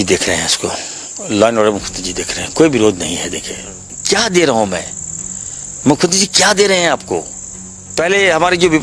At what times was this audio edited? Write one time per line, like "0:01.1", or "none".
0:03.9
0:07.9